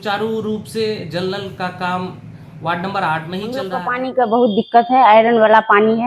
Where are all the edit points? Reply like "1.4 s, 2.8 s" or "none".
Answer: 3.9 s